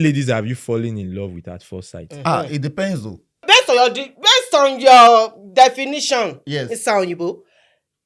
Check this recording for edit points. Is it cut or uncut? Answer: cut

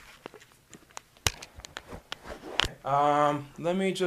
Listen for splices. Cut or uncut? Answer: uncut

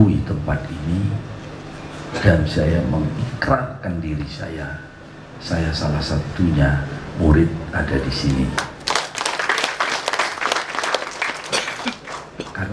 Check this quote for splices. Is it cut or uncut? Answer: uncut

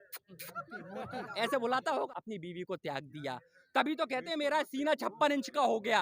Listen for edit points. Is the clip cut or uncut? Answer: cut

